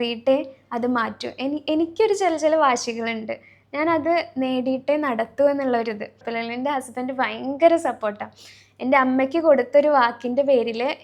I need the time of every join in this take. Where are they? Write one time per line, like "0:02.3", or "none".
0:06.2